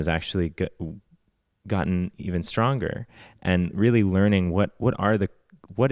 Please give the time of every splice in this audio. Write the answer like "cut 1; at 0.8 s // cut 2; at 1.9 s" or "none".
none